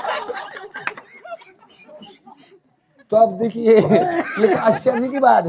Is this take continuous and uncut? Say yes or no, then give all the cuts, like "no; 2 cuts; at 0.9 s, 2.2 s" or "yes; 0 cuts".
yes; 0 cuts